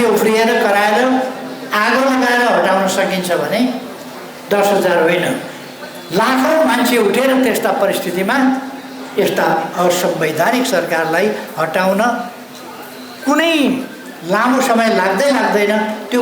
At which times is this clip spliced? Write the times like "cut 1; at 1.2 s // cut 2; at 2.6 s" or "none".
none